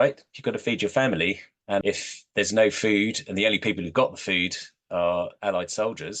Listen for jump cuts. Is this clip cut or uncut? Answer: cut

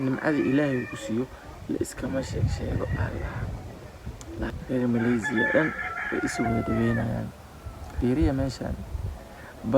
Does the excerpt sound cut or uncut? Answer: cut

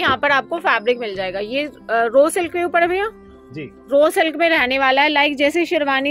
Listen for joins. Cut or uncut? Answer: uncut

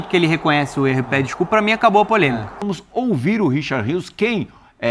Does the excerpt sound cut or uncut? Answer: cut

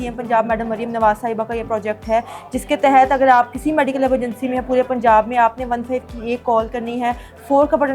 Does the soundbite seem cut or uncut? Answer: uncut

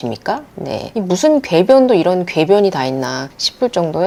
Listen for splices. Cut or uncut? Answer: uncut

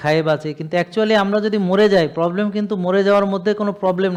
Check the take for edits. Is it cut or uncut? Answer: uncut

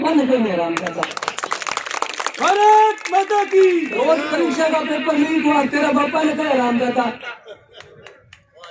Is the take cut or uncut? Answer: uncut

